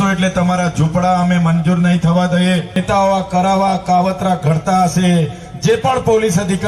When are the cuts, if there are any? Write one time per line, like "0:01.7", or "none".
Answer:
0:02.8